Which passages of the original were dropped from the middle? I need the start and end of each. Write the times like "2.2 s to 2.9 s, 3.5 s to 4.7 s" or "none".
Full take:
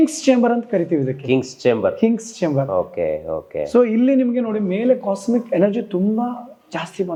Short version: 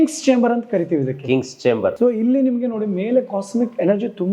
2.0 s to 3.7 s